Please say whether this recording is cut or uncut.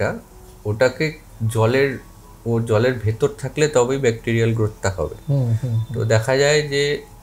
uncut